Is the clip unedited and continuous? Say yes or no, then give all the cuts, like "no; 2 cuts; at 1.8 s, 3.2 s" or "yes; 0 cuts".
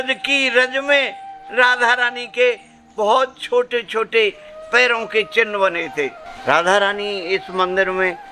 no; 1 cut; at 6.3 s